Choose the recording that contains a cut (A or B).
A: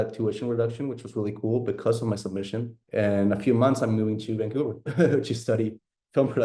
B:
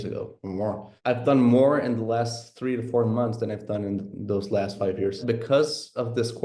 B